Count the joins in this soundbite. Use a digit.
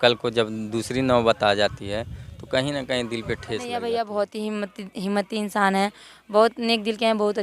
1